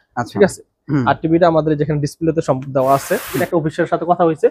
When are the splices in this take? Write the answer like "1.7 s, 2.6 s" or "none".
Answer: 3.4 s